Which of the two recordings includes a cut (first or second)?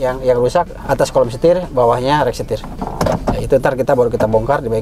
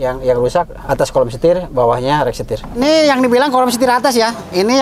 second